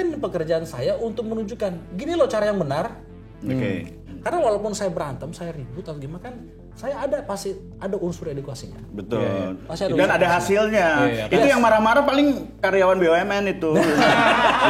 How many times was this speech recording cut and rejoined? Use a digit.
1